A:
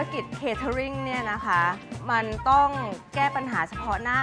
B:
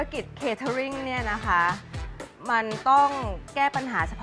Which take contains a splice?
A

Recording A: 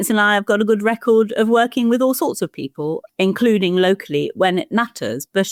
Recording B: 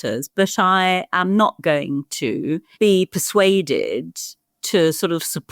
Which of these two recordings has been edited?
B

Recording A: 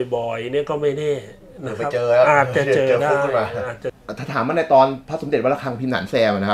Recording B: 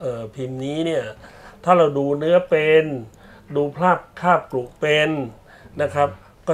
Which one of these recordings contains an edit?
A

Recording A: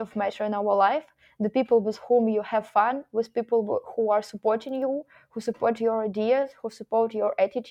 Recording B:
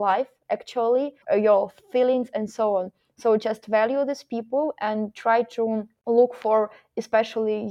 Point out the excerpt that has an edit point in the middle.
B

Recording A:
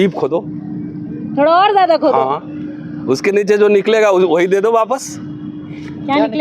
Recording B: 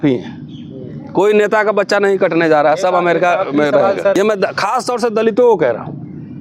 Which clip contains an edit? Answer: B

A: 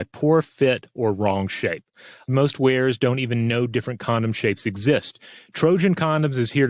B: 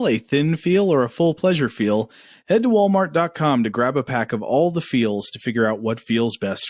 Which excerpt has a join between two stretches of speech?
A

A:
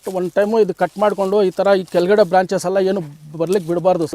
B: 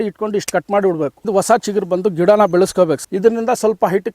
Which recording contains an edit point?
B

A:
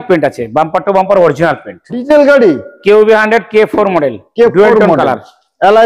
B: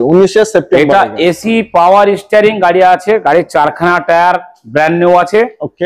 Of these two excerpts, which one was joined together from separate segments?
A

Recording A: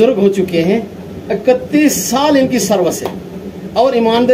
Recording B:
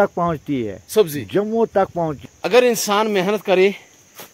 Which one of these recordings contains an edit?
B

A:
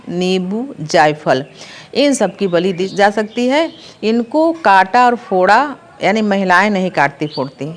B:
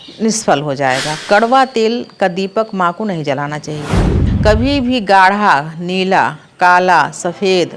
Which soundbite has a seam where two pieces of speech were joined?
B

